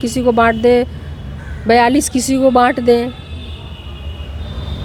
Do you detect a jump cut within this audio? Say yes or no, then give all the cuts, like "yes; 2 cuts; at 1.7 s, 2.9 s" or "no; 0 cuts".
no; 0 cuts